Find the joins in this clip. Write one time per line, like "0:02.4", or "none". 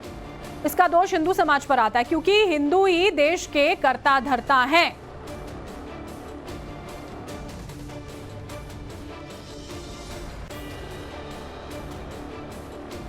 0:02.9